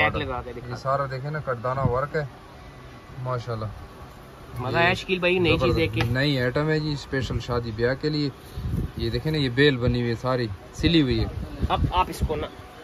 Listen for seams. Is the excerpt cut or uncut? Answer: uncut